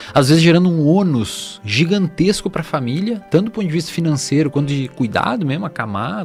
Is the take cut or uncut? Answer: uncut